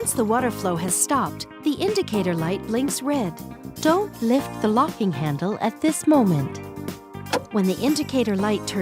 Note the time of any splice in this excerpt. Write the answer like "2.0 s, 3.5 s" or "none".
none